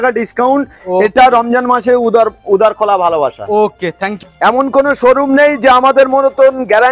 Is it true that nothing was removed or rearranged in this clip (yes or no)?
no